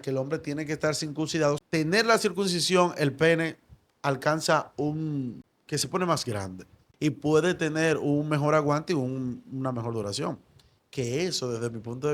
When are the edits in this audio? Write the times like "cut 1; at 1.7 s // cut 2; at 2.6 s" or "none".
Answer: cut 1; at 1.6 s // cut 2; at 5.5 s // cut 3; at 6.9 s

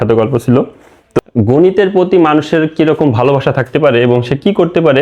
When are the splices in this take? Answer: cut 1; at 1.2 s

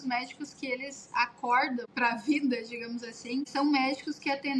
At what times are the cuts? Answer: cut 1; at 1.9 s // cut 2; at 3.5 s

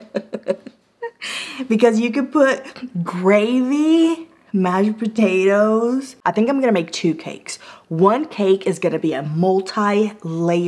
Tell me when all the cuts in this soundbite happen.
cut 1; at 6.1 s

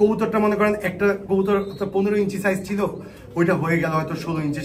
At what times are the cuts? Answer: none

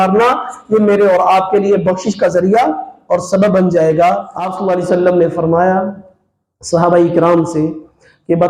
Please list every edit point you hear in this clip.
cut 1; at 4.4 s

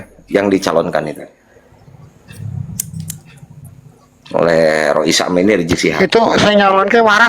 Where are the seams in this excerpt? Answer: none

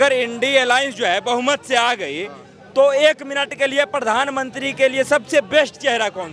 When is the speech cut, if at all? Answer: none

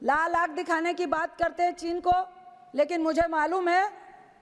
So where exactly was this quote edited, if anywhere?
none

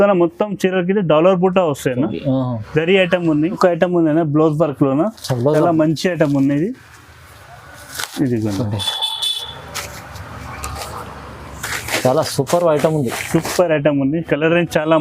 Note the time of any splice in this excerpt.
cut 1; at 3.5 s

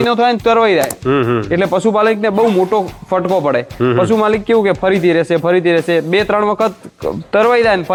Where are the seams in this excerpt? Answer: none

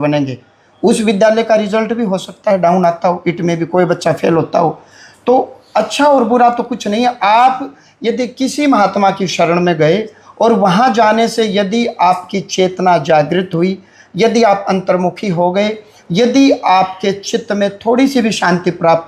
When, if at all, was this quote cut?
none

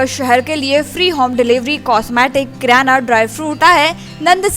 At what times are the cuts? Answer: cut 1; at 3.6 s

